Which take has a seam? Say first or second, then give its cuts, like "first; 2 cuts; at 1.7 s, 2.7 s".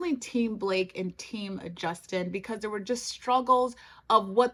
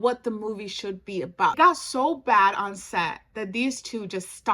second; 1 cut; at 1.5 s